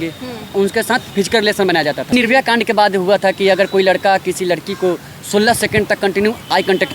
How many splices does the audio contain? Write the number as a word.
two